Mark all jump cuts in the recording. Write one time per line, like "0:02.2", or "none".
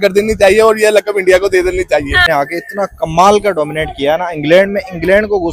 0:02.3